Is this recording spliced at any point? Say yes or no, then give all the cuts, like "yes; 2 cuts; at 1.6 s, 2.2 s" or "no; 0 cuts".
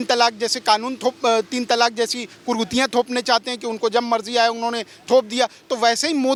no; 0 cuts